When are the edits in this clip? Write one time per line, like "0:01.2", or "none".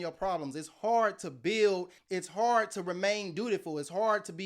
0:02.0